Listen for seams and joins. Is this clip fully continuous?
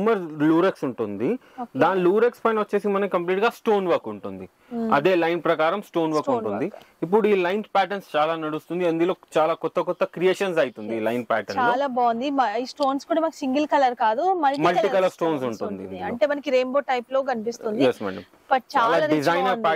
yes; 0 cuts

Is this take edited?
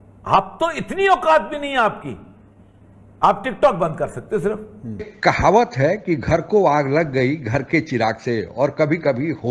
no; 0 cuts

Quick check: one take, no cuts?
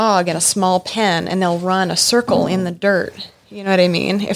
yes; 0 cuts

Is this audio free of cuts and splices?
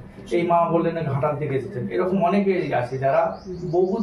yes; 0 cuts

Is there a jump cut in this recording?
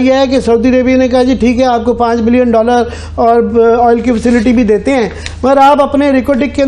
no; 0 cuts

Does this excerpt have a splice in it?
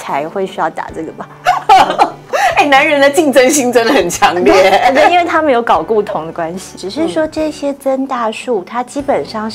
yes; 2 cuts; at 2.3 s, 6.6 s

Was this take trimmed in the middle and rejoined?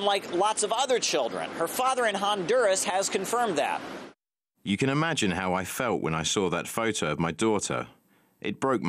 yes; 1 cut; at 6.5 s

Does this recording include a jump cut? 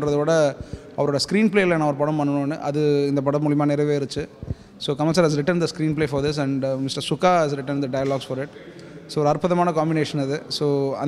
no; 0 cuts

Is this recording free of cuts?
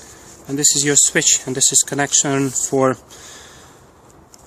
yes; 0 cuts

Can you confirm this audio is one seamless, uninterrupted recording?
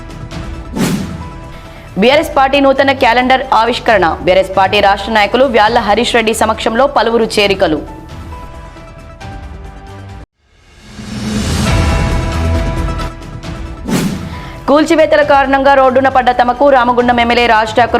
yes; 0 cuts

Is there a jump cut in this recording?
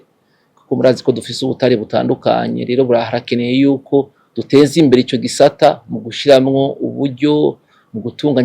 no; 0 cuts

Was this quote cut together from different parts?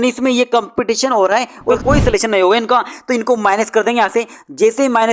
yes; 1 cut; at 1.8 s

